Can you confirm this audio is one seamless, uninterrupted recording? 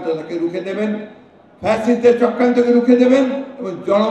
yes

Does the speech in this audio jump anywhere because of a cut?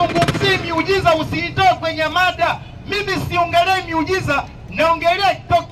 no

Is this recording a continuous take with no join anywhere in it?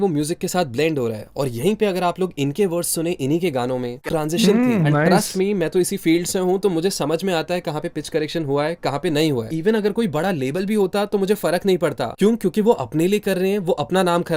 no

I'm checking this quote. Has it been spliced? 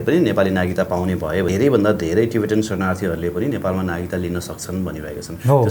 yes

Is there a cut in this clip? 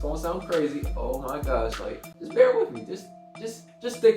yes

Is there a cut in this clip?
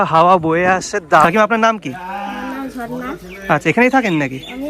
yes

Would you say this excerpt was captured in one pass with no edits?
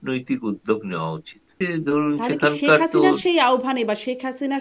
no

